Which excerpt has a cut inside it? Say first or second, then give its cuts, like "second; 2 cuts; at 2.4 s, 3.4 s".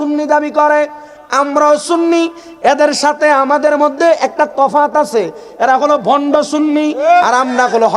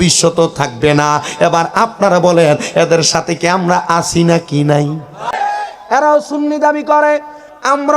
second; 1 cut; at 5.2 s